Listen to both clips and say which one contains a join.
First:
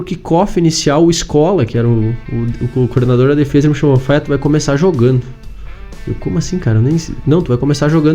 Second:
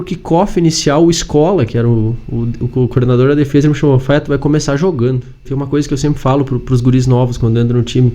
second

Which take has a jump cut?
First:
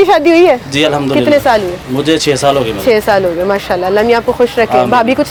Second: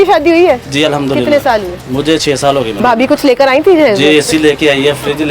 second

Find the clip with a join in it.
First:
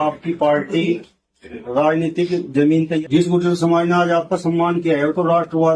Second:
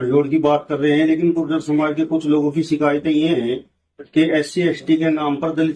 first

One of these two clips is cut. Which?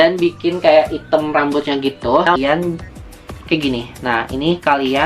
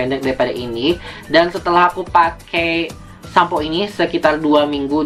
first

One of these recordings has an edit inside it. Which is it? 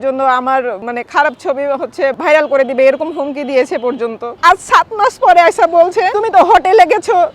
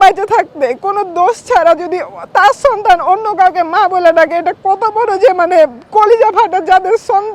first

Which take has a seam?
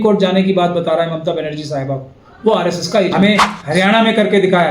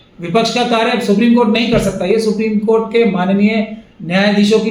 first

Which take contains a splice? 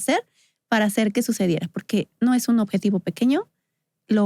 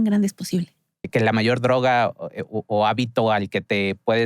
second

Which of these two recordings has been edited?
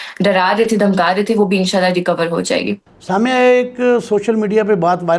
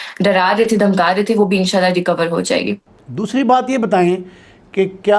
first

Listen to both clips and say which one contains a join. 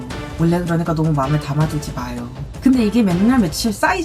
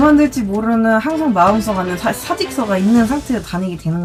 first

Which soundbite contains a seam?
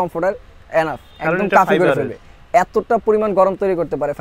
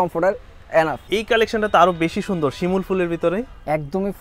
second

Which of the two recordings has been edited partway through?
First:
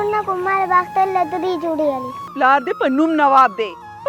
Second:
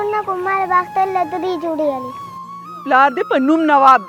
first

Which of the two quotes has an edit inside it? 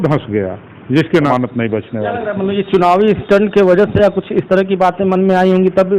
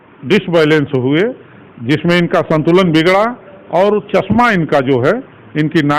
first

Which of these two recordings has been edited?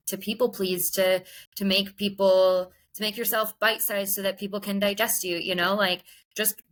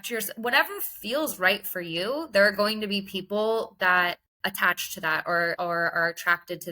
second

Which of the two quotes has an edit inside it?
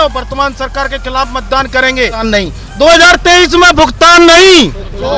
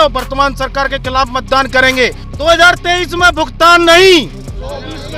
second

